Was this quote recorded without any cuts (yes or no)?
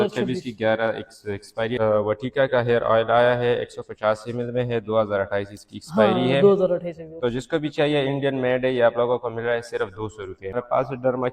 no